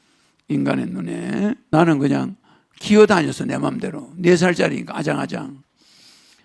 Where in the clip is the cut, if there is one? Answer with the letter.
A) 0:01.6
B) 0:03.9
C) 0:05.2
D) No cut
A